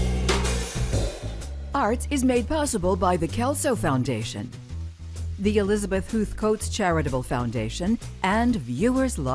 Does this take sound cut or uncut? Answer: uncut